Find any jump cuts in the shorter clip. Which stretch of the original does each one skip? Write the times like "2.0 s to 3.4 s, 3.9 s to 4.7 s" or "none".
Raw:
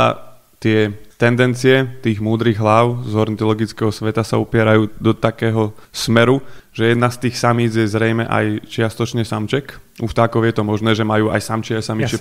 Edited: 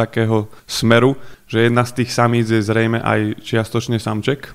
none